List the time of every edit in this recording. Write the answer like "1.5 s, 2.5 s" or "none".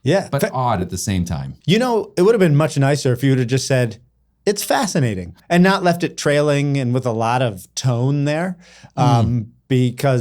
1.5 s, 5.4 s